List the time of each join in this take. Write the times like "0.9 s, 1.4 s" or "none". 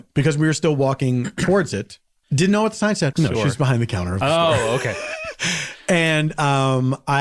2.2 s, 3.1 s